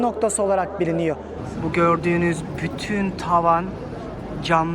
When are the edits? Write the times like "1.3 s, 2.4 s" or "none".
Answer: 1.3 s

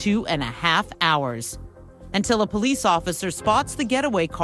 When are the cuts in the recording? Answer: 3.2 s

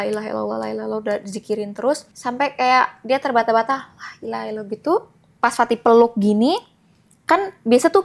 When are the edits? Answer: 2.1 s, 5.3 s

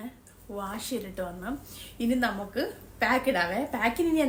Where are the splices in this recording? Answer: none

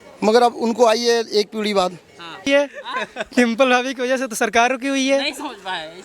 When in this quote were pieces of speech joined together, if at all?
2.5 s

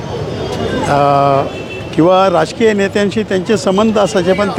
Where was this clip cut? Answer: none

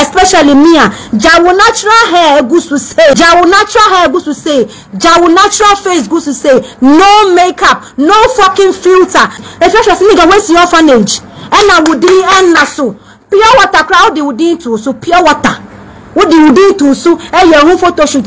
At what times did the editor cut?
3.1 s, 9.4 s

